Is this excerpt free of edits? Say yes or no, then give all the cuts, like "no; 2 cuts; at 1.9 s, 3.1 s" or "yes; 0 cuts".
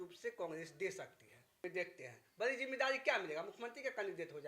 no; 1 cut; at 1.6 s